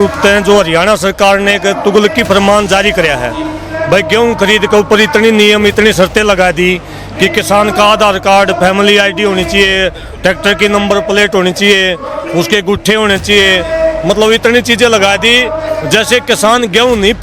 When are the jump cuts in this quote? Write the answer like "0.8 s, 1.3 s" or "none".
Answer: none